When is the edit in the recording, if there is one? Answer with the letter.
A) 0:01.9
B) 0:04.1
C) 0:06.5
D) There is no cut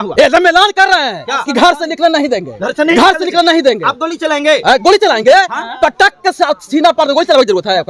D